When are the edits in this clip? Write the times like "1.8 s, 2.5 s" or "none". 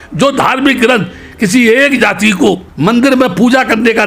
2.7 s